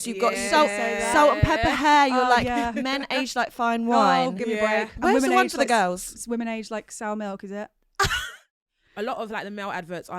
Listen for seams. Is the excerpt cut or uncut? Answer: cut